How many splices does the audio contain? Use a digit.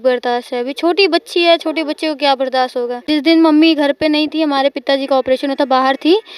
1